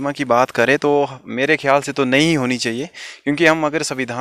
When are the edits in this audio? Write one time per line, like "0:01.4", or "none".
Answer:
none